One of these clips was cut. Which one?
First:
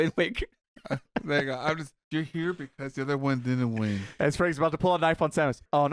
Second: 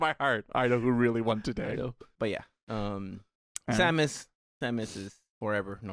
second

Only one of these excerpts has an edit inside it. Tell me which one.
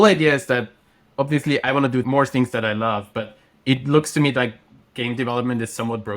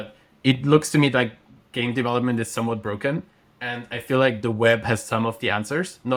first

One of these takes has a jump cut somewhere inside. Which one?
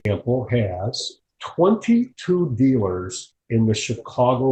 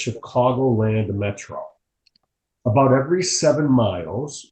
second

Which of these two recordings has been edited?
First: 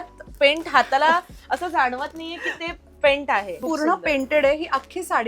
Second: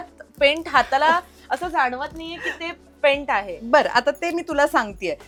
first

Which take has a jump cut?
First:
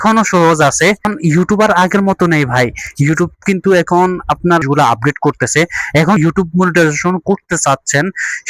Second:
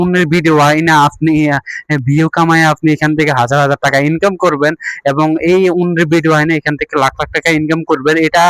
first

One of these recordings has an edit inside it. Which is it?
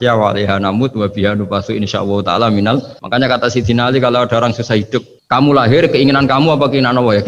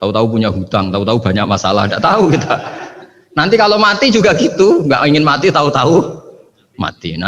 first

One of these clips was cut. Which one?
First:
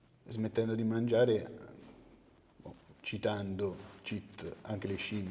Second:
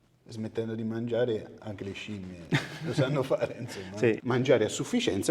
second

